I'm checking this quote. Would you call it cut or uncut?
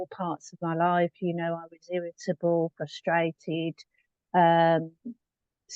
uncut